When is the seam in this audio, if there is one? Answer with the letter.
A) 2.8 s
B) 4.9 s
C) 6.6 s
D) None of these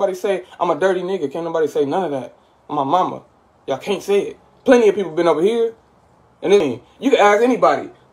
C